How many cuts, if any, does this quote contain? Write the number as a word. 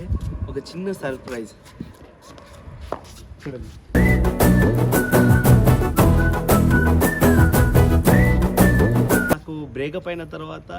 one